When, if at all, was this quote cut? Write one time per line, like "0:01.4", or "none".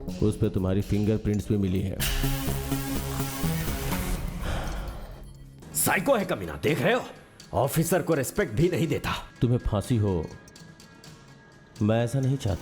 0:05.6
0:09.2